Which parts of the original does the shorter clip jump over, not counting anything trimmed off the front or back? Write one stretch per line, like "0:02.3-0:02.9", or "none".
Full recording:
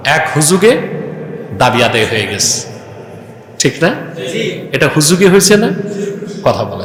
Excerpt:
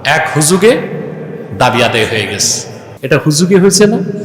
0:02.9-0:04.6